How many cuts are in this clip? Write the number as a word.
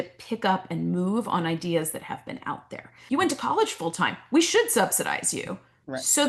one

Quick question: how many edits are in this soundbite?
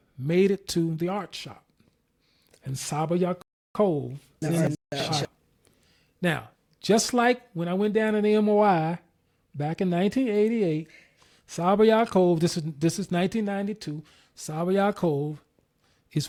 zero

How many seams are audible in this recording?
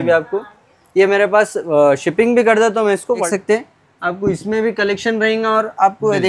one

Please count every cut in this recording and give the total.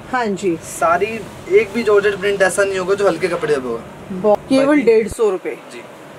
one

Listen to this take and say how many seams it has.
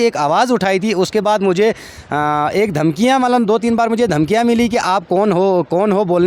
zero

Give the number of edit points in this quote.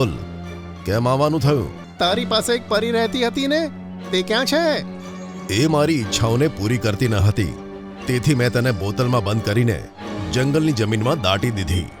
one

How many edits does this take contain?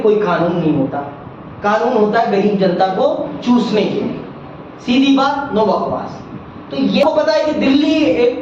one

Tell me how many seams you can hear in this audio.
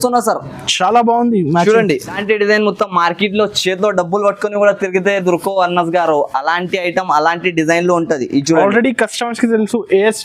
one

